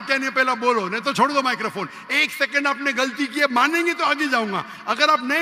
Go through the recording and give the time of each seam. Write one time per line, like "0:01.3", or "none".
none